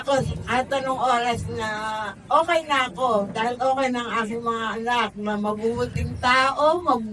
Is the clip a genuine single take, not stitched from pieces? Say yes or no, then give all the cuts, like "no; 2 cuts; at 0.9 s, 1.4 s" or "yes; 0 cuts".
yes; 0 cuts